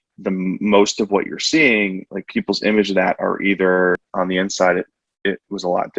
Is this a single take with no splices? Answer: no; 1 cut; at 4.1 s

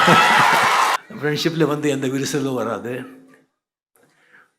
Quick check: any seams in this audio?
yes; 1 cut; at 0.9 s

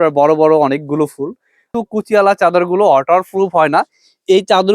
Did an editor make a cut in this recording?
yes; 1 cut; at 1.6 s

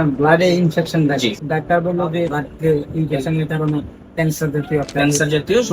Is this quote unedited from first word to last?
no; 2 cuts; at 1.4 s, 2.4 s

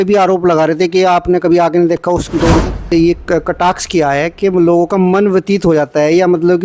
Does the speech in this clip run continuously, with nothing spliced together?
no; 1 cut; at 2.9 s

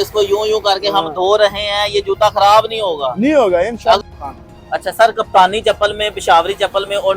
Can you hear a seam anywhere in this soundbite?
yes; 1 cut; at 4.0 s

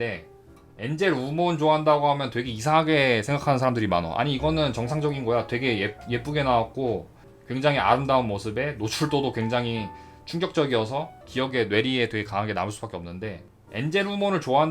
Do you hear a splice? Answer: yes; 2 cuts; at 7.2 s, 11.2 s

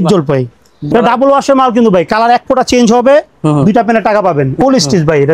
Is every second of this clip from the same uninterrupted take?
no; 2 cuts; at 0.9 s, 4.6 s

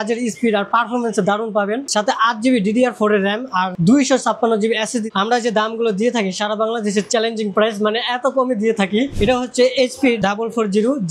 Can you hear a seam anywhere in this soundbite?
yes; 4 cuts; at 1.8 s, 3.7 s, 5.1 s, 9.1 s

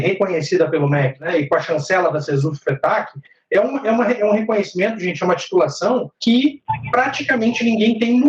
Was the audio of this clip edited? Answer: yes; 3 cuts; at 1.2 s, 6.1 s, 6.7 s

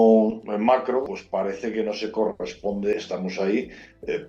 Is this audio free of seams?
no; 2 cuts; at 1.0 s, 2.9 s

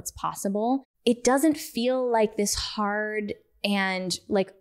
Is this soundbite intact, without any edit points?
no; 1 cut; at 0.9 s

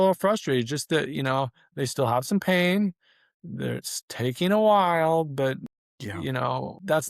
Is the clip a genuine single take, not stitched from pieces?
yes; 0 cuts

